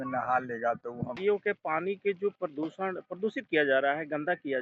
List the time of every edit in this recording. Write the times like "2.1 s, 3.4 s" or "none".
1.2 s

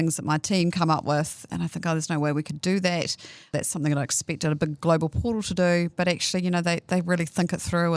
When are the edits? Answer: 1.5 s, 3.5 s

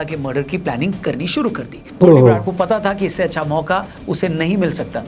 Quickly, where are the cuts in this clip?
1.8 s

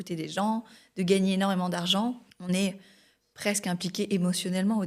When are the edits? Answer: 2.3 s

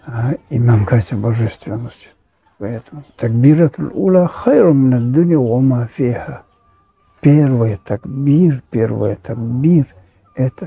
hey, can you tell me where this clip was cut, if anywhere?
2.7 s

